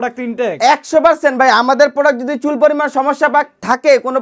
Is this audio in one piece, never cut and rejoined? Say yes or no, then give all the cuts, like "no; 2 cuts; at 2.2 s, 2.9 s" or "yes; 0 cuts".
yes; 0 cuts